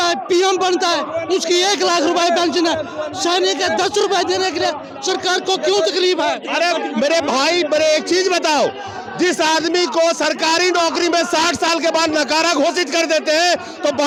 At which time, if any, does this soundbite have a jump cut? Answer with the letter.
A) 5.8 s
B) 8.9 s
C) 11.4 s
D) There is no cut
D